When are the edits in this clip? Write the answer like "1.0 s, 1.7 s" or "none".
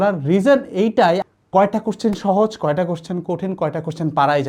1.2 s